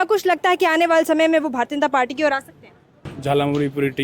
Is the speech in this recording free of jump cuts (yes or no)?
no